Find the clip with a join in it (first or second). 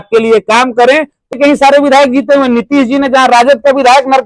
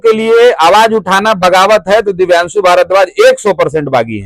first